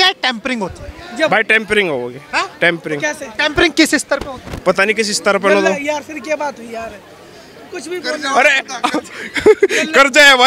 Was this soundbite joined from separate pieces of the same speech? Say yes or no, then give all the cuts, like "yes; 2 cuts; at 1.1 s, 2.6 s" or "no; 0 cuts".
no; 0 cuts